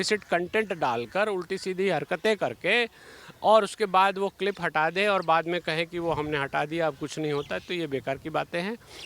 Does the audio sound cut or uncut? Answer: uncut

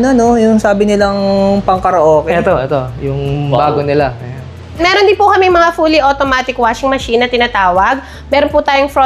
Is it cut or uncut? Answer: cut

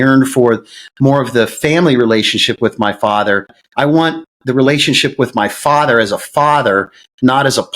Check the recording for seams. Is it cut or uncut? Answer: cut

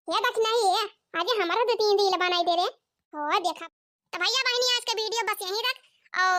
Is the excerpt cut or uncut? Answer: cut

